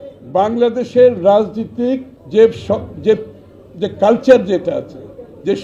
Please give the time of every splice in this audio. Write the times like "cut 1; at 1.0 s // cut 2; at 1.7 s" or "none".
cut 1; at 2.1 s